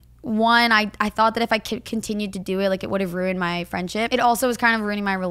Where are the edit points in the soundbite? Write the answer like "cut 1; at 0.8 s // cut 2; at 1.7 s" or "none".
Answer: cut 1; at 4.1 s